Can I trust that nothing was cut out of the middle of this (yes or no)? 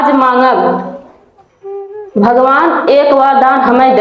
yes